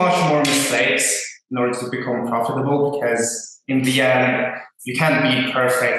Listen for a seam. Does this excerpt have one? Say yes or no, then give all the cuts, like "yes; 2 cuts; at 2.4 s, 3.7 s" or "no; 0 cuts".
no; 0 cuts